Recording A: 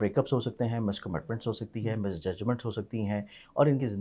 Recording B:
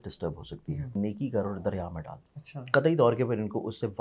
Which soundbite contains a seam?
B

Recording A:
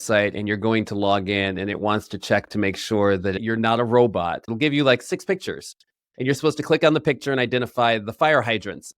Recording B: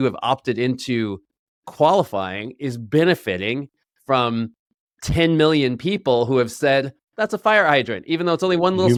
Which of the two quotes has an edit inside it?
A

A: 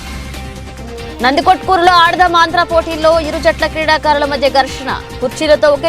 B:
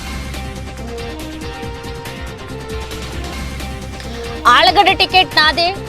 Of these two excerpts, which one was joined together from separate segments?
A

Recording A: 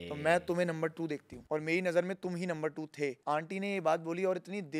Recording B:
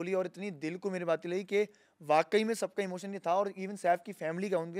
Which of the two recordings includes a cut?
A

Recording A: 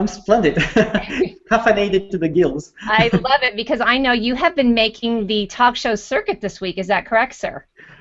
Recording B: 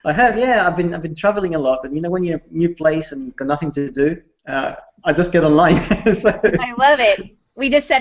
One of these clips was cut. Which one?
B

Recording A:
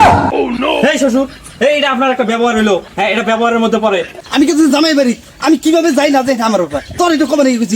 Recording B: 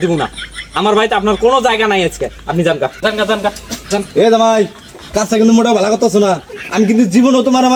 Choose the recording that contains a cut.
A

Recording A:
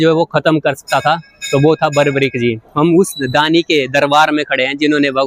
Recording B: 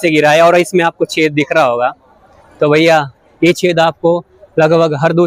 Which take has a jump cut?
A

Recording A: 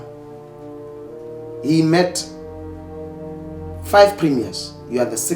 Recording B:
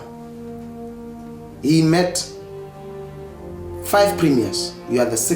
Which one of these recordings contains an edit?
A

